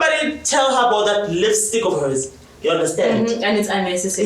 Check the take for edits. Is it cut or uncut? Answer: uncut